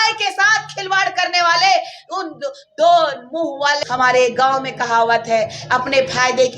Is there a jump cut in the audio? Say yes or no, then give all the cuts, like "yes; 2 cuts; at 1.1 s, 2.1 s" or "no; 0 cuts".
yes; 1 cut; at 3.8 s